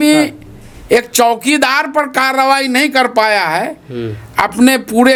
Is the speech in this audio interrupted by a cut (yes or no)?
no